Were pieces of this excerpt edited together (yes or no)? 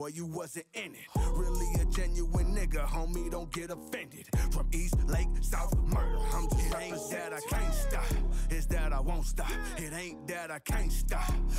no